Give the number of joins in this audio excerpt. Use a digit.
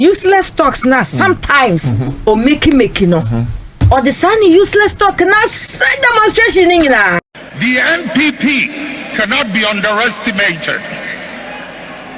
1